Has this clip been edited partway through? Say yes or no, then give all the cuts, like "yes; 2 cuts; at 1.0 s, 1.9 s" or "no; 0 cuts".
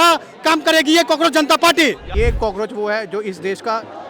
yes; 1 cut; at 2.1 s